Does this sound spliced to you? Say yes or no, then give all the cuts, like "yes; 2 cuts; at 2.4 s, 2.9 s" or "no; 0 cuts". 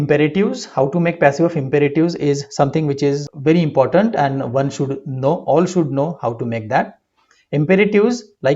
yes; 1 cut; at 3.3 s